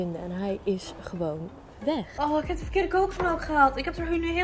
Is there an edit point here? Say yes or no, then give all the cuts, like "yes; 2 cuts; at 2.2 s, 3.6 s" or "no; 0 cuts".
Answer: yes; 1 cut; at 2.1 s